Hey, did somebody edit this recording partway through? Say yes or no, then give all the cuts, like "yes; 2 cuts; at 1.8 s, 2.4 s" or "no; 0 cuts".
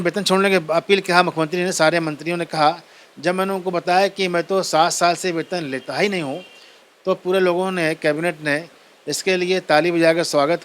no; 0 cuts